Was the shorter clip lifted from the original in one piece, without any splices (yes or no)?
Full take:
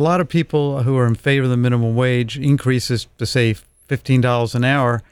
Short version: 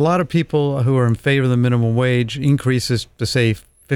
yes